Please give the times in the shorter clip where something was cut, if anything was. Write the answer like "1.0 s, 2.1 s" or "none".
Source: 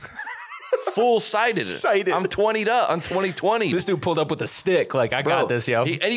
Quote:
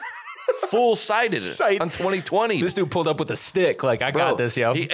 1.8 s